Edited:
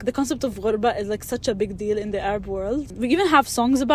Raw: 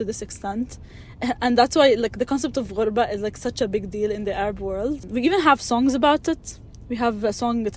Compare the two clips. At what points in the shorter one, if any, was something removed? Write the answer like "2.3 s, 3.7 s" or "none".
none